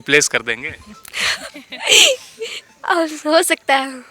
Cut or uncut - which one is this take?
uncut